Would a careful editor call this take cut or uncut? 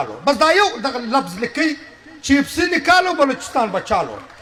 uncut